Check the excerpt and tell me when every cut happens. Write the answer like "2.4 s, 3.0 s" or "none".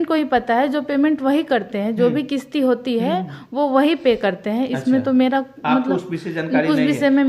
none

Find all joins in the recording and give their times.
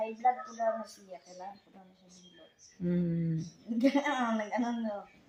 none

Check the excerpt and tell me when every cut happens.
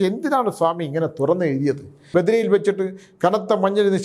2.0 s

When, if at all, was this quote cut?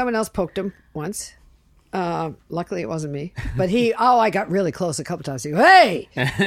none

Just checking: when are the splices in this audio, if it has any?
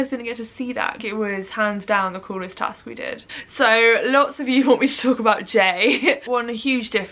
1.0 s, 3.2 s, 6.2 s

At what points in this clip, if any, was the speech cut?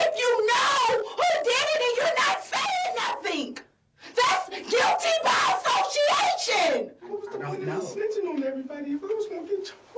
7.1 s

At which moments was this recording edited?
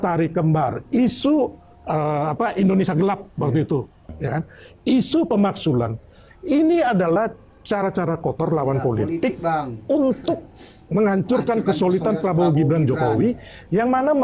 none

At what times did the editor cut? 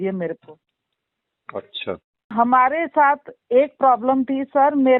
2.3 s

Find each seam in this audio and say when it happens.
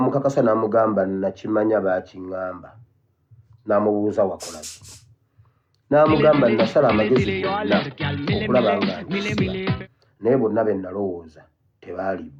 none

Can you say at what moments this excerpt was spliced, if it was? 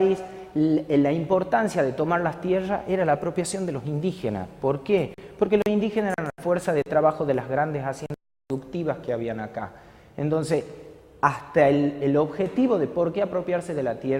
7.0 s

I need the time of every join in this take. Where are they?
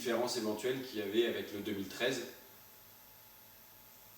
1.3 s

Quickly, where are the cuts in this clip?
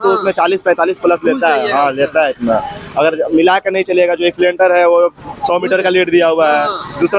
none

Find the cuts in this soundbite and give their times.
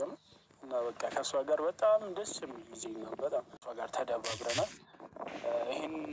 3.7 s

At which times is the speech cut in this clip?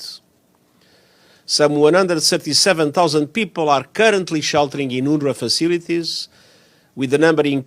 none

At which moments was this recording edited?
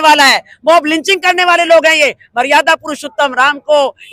none

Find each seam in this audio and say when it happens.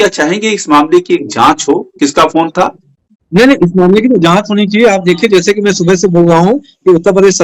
none

